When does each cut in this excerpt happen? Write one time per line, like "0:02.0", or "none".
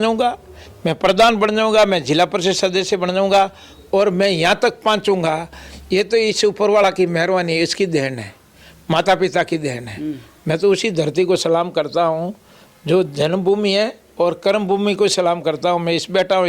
none